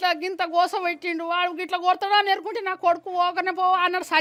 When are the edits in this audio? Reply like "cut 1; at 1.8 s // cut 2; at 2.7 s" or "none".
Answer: none